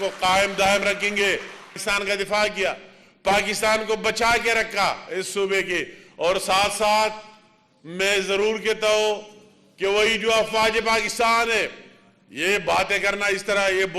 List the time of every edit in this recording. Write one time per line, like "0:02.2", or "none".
0:01.7